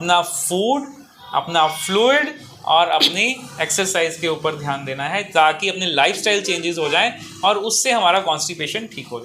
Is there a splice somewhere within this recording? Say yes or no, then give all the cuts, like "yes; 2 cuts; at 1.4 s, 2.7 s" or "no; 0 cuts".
no; 0 cuts